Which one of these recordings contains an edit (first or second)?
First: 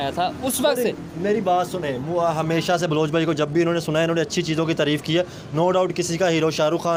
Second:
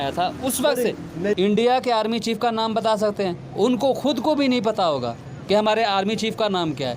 second